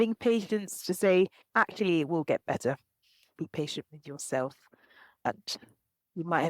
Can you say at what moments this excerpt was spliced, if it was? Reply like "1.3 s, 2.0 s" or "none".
3.3 s